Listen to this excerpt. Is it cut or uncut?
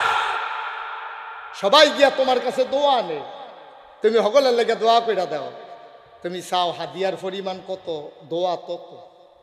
uncut